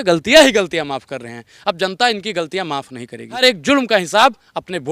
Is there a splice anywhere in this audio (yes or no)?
yes